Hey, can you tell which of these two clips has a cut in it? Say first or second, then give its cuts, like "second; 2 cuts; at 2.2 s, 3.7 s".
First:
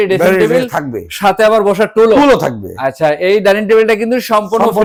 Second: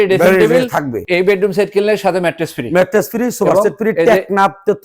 second; 1 cut; at 1.0 s